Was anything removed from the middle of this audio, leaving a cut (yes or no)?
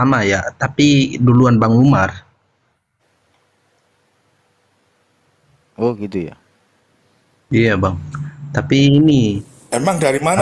no